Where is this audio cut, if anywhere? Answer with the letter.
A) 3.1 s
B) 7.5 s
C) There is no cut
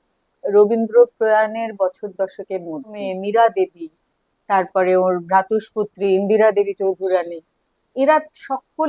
A